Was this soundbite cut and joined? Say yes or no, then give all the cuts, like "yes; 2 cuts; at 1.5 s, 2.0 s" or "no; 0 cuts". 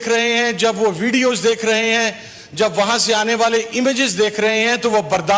no; 0 cuts